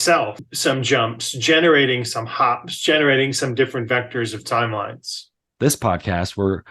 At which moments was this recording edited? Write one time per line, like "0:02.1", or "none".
0:05.5